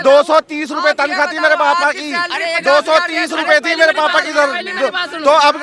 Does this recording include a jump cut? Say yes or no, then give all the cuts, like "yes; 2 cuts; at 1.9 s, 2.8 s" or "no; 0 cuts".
no; 0 cuts